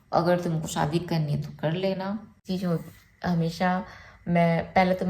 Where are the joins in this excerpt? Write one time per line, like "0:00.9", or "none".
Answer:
0:02.4